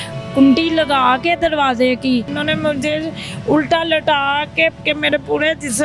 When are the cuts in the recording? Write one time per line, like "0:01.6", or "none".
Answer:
0:02.3
0:04.8

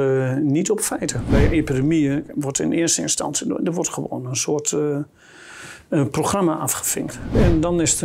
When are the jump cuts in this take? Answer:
0:01.3
0:07.3

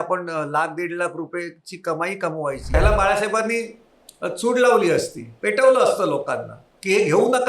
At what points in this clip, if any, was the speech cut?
0:02.7

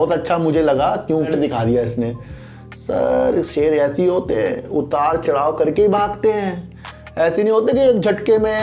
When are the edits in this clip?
0:01.3

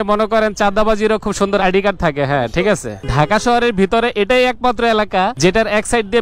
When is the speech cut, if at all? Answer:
0:03.0

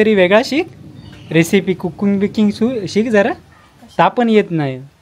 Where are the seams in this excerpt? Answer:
none

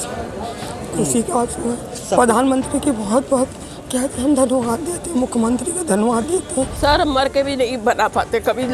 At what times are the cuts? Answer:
0:06.7

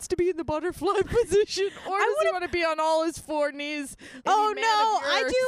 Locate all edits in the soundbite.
0:04.1

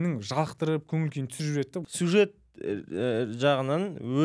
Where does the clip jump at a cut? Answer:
0:01.9

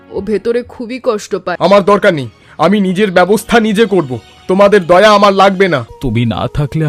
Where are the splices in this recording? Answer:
0:01.6
0:05.9

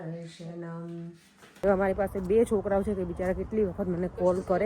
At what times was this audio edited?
0:01.4

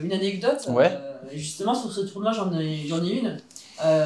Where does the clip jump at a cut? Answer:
none

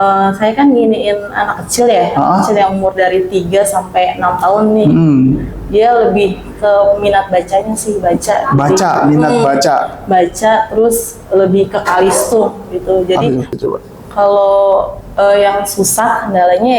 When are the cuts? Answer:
0:13.5

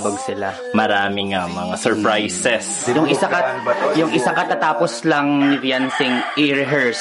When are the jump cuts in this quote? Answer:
0:03.3

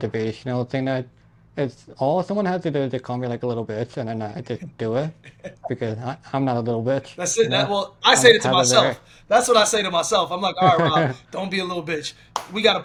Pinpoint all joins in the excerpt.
none

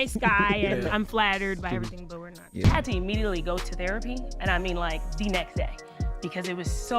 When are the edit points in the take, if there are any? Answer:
0:02.5

